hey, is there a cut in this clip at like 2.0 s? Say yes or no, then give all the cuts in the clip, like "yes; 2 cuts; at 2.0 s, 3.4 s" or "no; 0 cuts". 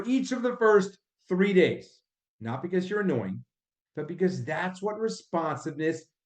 yes; 1 cut; at 2.0 s